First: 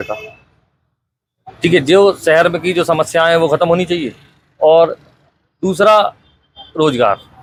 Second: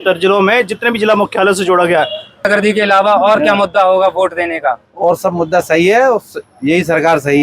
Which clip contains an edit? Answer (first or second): second